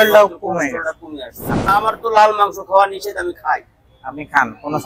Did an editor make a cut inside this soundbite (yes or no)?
yes